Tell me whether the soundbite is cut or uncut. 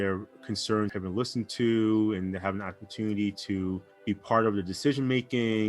cut